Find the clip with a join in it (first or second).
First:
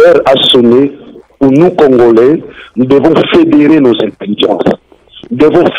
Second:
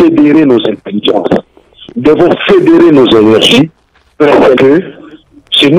second